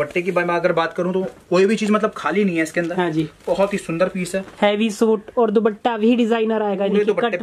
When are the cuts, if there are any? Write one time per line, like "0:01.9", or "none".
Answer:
none